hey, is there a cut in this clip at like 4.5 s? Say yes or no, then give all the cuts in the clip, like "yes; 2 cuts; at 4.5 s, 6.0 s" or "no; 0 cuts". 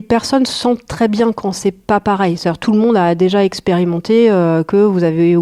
no; 0 cuts